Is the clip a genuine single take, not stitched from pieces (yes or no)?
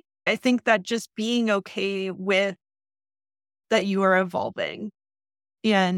yes